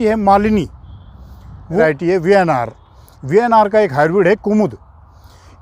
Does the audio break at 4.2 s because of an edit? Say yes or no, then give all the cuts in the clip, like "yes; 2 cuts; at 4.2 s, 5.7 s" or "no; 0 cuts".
no; 1 cut; at 1.8 s